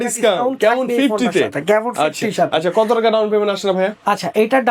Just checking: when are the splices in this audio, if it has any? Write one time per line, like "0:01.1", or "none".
none